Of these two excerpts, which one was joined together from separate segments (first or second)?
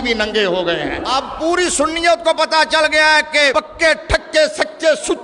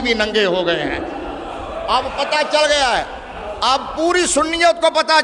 first